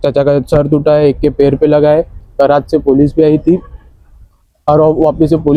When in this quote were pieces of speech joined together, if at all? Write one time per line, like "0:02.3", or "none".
none